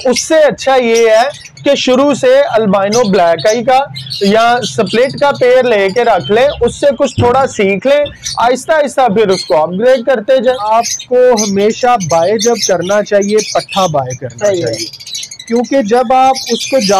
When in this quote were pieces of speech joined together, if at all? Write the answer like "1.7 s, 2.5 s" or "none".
10.6 s